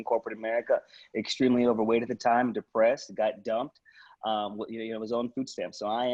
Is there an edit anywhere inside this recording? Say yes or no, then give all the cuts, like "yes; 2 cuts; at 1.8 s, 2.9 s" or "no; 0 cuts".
no; 0 cuts